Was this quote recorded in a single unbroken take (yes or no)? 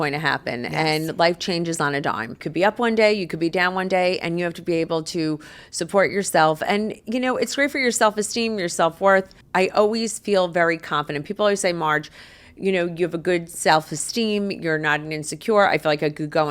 no